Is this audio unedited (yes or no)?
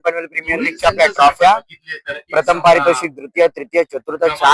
yes